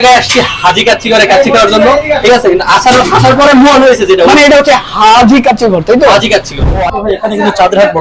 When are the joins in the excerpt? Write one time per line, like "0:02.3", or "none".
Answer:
0:06.7